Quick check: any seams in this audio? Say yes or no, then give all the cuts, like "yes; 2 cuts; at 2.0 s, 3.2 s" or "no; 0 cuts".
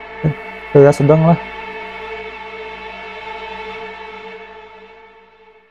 yes; 1 cut; at 1.4 s